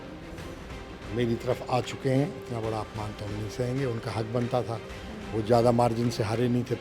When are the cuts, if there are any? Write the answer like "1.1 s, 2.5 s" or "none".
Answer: 2.4 s